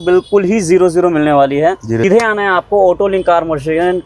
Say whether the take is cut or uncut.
cut